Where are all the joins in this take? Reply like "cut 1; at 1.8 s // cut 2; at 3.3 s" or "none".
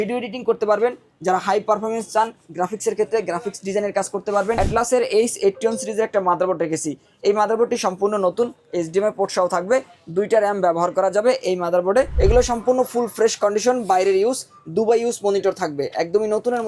cut 1; at 4.6 s // cut 2; at 12.1 s